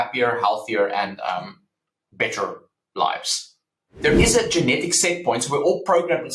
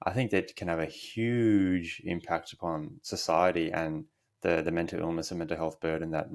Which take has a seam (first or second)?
first